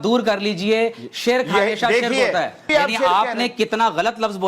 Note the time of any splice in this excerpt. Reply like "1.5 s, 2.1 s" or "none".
2.7 s